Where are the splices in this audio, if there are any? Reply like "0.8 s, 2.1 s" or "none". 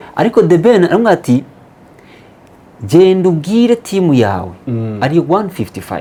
none